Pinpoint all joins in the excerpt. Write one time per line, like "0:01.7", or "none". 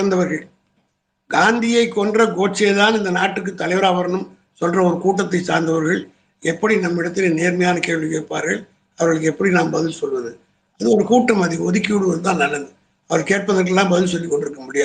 none